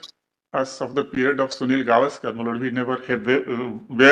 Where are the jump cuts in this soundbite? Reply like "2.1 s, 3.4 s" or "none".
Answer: none